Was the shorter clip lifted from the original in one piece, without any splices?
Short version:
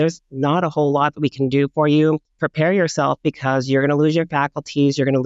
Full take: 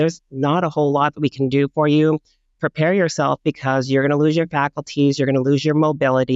no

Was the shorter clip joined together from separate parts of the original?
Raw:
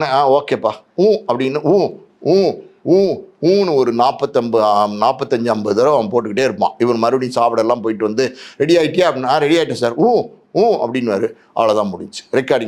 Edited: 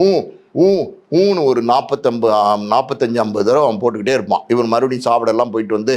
no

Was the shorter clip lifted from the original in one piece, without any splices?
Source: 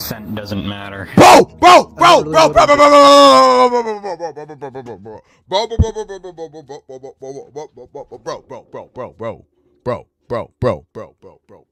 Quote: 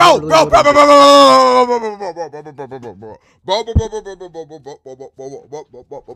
yes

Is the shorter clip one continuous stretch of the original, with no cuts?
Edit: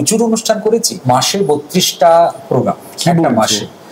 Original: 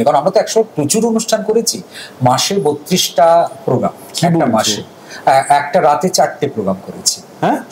no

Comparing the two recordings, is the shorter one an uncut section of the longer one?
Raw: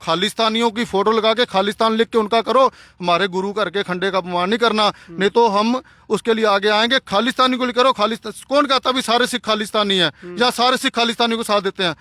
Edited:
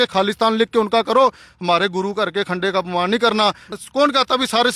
no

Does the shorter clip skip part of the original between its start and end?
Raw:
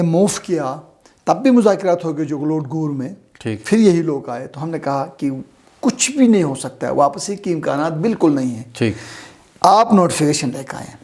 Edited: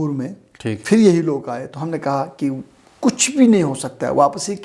no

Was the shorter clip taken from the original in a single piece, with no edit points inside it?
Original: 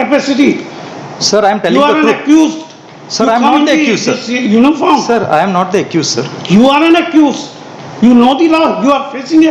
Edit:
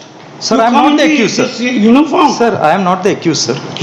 yes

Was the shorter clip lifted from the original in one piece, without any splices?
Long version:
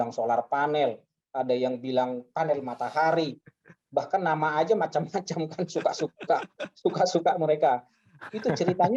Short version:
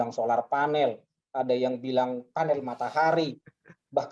yes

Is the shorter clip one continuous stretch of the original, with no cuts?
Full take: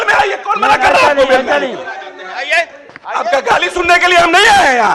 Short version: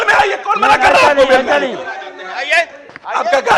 yes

